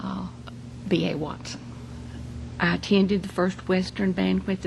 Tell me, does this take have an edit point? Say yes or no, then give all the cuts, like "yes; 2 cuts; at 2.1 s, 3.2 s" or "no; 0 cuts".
yes; 1 cut; at 1.7 s